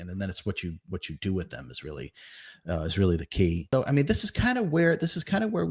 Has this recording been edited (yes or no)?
yes